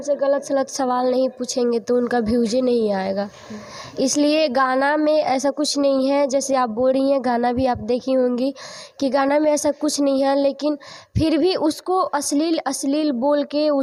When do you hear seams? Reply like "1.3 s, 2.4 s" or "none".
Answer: none